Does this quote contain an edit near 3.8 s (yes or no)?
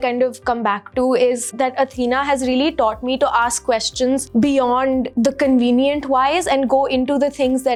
no